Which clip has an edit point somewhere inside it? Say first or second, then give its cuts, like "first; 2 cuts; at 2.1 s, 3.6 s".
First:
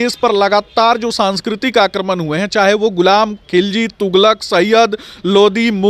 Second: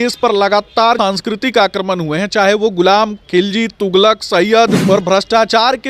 second; 2 cuts; at 1.0 s, 4.8 s